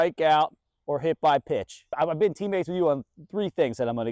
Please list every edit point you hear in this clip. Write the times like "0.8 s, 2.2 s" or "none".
1.9 s